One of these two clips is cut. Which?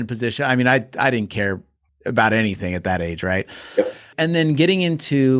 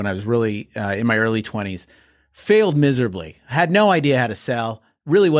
first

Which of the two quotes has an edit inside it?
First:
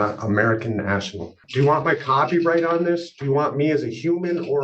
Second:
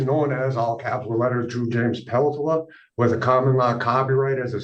first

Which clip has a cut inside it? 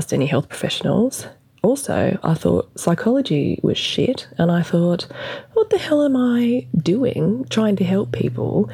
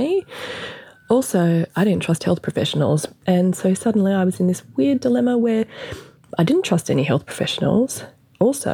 second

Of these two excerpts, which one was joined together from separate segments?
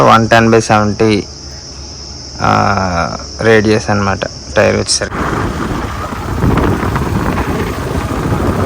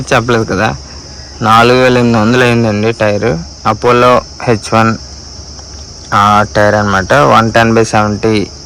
first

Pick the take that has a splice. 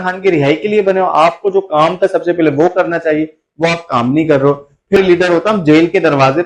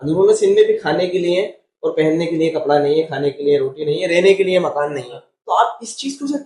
first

